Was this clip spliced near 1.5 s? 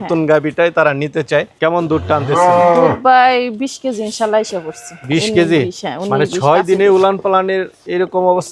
yes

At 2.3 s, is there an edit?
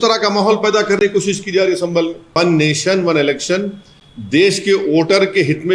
yes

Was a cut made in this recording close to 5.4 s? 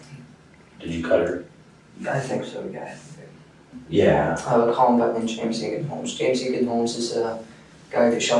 no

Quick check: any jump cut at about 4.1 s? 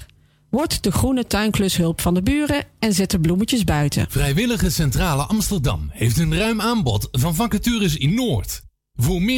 yes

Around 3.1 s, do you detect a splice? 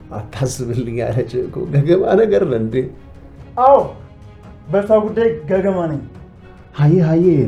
no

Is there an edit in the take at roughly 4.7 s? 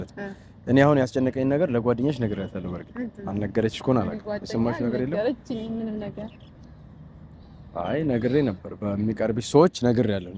no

